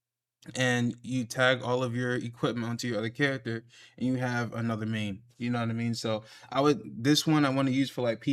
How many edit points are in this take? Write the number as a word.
zero